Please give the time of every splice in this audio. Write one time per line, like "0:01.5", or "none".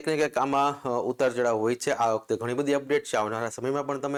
none